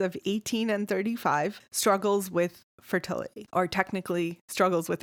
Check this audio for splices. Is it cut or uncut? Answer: cut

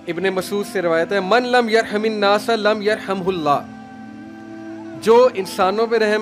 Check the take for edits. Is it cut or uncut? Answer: uncut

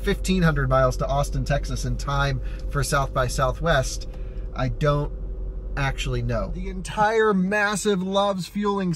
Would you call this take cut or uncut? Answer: cut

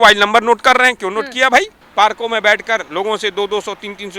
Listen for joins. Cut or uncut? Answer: cut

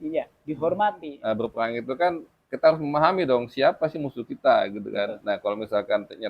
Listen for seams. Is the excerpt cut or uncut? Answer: cut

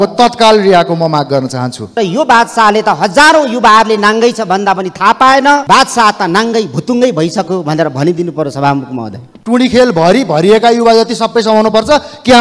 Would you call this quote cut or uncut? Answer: cut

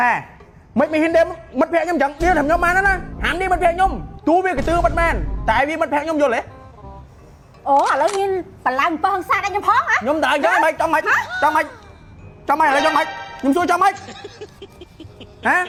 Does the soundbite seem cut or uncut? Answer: uncut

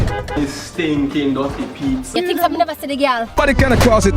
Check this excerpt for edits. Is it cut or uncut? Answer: uncut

